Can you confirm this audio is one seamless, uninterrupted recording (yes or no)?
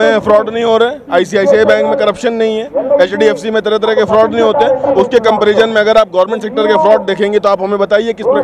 yes